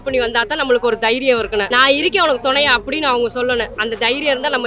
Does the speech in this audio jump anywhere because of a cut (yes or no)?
yes